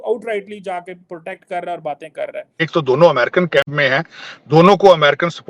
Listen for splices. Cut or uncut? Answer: cut